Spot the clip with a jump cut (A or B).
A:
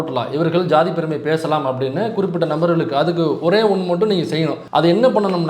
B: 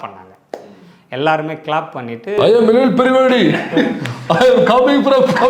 A